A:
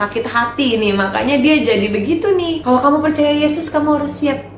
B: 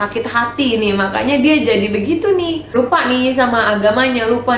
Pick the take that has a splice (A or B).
A